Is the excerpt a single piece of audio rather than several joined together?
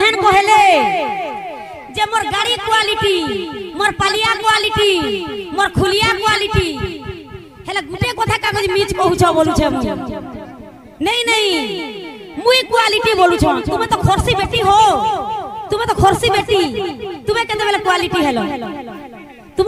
yes; 0 cuts

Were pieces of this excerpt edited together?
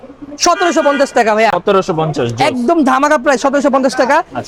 no; 0 cuts

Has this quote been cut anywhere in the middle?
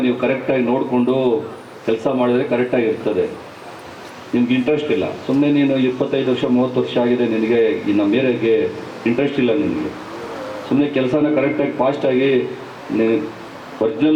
no; 0 cuts

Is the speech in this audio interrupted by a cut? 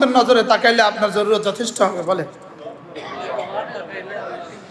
no; 0 cuts

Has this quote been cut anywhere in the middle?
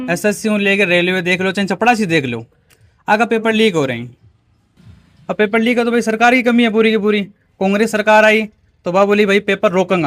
yes; 1 cut; at 4.6 s

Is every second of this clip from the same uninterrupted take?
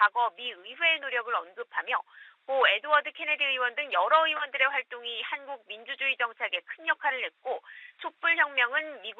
no; 1 cut; at 1.8 s

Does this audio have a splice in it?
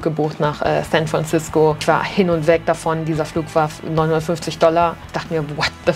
no; 0 cuts

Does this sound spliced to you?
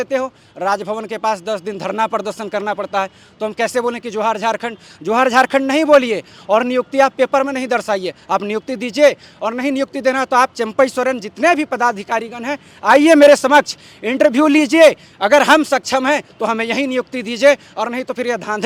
no; 0 cuts

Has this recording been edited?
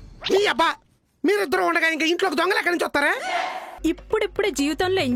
yes; 1 cut; at 3.7 s

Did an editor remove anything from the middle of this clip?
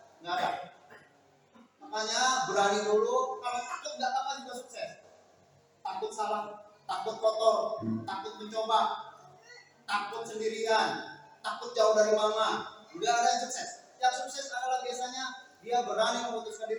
no; 0 cuts

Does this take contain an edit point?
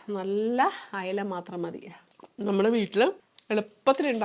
no; 0 cuts

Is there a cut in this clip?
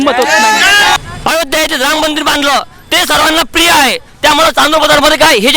yes; 1 cut; at 1.0 s

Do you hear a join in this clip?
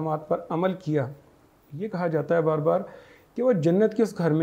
no; 0 cuts

